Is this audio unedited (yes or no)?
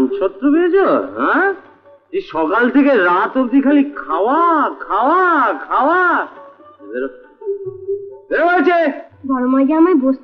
yes